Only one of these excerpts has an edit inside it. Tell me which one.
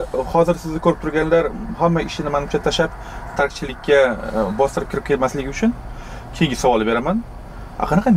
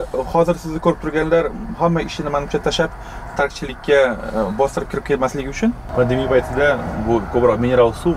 second; 1 cut; at 5.8 s

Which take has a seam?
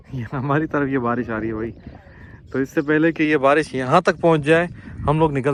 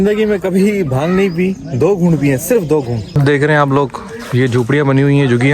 second; 1 cut; at 3.2 s

